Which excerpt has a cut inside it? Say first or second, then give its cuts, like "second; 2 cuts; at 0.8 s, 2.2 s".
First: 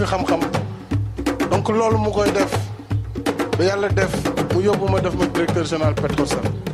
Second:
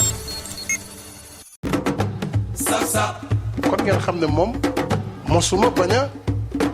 second; 1 cut; at 1.6 s